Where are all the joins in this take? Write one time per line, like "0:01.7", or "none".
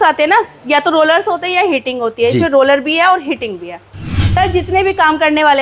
0:04.2

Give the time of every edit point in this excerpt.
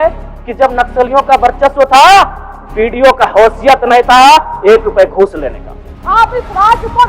0:05.9

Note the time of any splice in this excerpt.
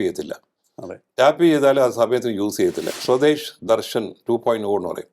0:02.9

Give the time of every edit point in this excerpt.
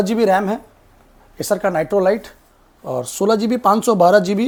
none

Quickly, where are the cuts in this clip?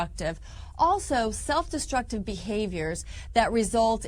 0:01.0

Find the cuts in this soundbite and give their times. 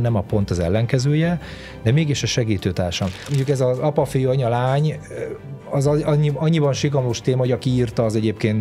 0:03.3

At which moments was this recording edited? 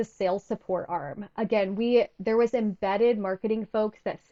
none

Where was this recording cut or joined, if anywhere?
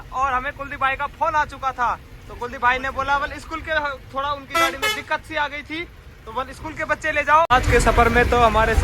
0:07.5

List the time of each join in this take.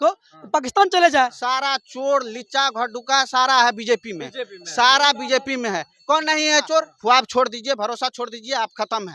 0:01.4
0:06.9

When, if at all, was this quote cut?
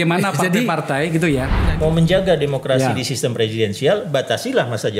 0:01.6

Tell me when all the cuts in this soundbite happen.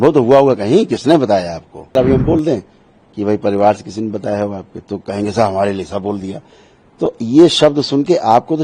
0:02.0

